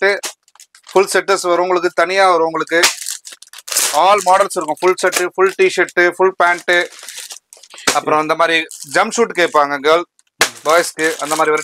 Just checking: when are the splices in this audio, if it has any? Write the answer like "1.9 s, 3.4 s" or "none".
none